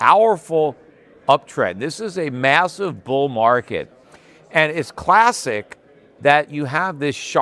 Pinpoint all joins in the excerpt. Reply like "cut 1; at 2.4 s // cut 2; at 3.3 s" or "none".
none